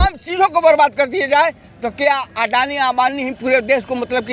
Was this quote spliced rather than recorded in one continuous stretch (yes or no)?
no